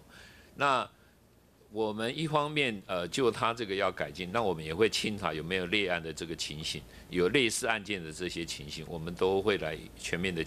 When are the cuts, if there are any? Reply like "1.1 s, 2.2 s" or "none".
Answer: none